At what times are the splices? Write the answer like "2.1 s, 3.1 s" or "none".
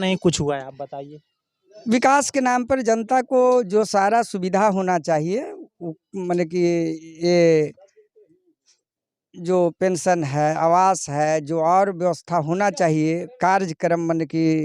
none